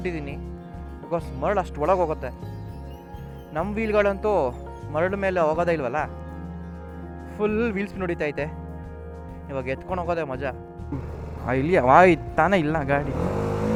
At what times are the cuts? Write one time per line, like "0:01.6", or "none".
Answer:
none